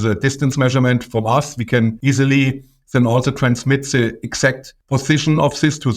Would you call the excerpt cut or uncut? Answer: cut